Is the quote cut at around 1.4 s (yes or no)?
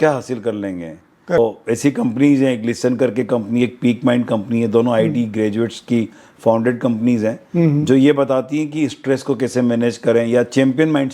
yes